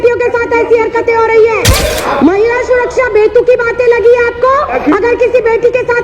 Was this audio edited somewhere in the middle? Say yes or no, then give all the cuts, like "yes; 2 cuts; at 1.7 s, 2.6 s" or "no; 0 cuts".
yes; 2 cuts; at 1.8 s, 4.7 s